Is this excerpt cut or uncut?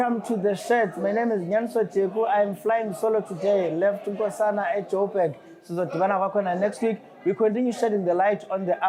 uncut